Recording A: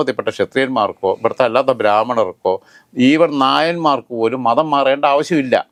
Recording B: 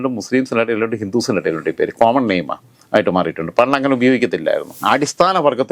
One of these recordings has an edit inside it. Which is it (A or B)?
B